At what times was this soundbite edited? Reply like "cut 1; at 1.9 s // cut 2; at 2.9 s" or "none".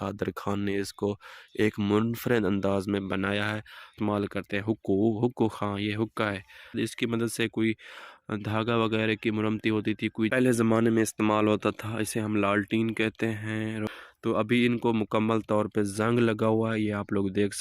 cut 1; at 3.9 s // cut 2; at 6.7 s // cut 3; at 10.3 s // cut 4; at 13.8 s